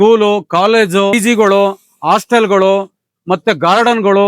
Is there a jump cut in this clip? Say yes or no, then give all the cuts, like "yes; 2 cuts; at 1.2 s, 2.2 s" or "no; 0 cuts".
yes; 1 cut; at 1.1 s